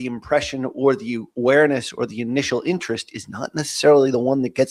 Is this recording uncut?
yes; 0 cuts

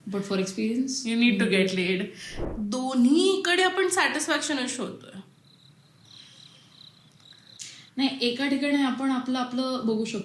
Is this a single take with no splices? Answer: no; 2 cuts; at 2.3 s, 7.6 s

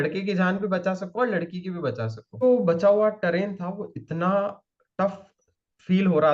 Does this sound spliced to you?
yes; 1 cut; at 2.4 s

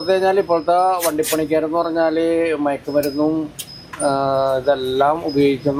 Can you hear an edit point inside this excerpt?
no; 0 cuts

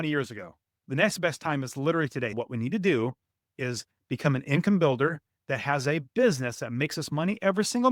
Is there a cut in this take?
yes; 1 cut; at 2.4 s

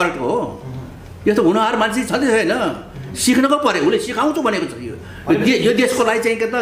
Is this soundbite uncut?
yes; 0 cuts

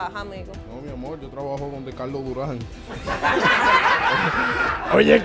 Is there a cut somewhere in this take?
no; 0 cuts

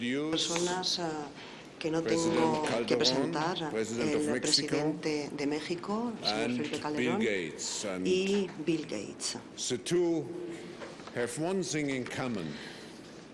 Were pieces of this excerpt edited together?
no; 0 cuts

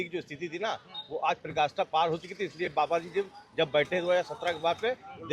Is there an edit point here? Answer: no; 0 cuts

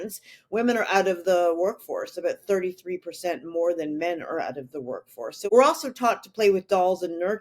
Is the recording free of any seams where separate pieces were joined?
no; 1 cut; at 5.5 s

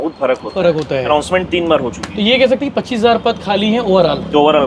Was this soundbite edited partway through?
no; 0 cuts

